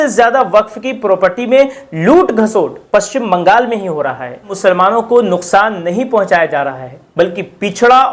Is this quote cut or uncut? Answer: cut